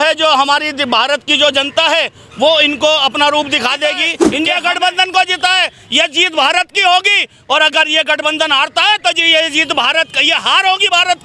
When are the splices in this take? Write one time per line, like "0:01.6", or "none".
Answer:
0:04.2